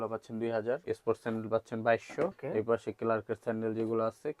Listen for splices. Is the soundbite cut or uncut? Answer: cut